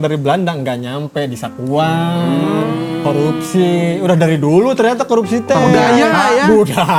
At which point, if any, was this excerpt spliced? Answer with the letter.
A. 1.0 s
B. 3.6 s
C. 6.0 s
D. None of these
D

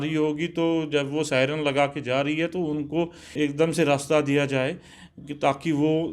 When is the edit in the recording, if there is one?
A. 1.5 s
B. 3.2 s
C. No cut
B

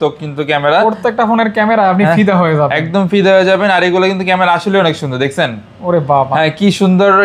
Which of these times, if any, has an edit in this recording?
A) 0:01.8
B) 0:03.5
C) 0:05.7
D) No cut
D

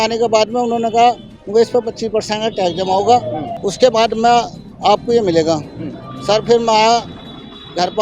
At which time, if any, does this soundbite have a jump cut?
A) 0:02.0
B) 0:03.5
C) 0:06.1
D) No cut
B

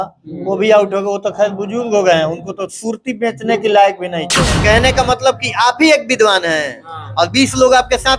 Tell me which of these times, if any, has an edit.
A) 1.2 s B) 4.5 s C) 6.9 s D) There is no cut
B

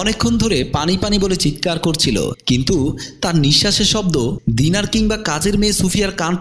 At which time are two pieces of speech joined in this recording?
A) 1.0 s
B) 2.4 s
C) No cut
C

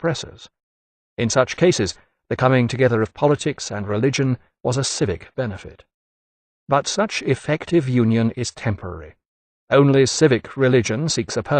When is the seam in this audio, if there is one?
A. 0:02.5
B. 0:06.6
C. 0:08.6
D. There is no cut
A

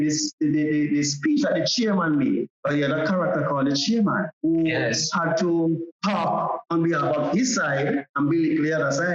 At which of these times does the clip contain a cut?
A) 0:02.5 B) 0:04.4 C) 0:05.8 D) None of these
A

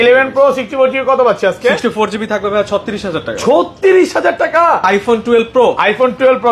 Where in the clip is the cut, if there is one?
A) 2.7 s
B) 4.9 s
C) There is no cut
B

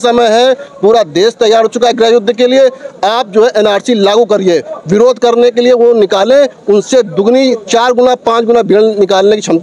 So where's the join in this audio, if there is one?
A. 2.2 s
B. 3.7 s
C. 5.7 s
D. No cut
D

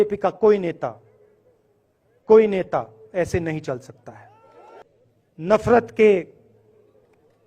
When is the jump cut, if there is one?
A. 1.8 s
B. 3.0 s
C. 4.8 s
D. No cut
C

